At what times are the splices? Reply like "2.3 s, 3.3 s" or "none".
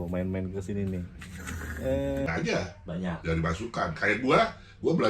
2.3 s